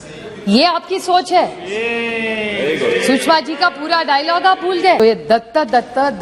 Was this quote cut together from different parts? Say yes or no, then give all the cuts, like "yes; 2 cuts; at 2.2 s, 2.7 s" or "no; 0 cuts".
yes; 1 cut; at 5.0 s